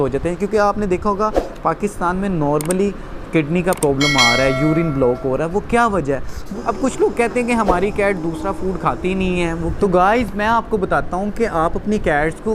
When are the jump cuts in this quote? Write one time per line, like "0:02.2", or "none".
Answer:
0:06.5
0:09.7